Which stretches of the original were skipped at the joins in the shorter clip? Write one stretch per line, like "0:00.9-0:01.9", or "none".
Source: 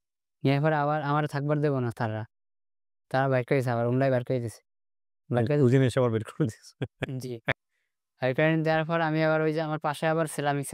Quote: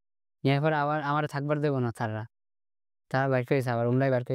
none